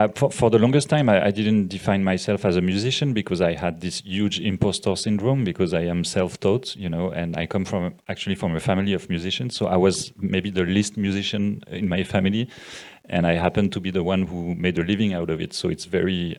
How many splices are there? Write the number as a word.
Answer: zero